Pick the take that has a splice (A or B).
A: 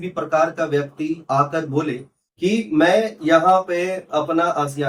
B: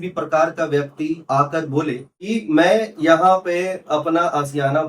B